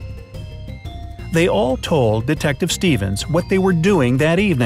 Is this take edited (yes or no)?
yes